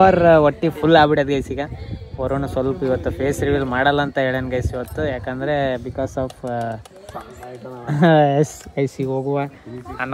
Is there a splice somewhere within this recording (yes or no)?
no